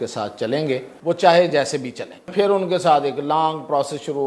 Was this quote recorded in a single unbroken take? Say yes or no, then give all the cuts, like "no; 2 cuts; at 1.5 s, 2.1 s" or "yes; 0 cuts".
no; 2 cuts; at 0.9 s, 2.3 s